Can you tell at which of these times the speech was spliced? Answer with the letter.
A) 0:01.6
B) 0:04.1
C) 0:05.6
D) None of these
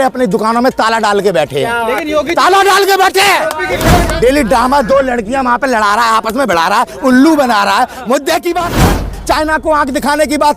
B